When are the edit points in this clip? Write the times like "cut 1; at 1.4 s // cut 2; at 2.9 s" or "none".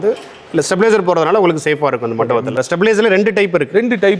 cut 1; at 2.6 s